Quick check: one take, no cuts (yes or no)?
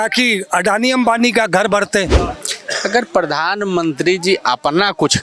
no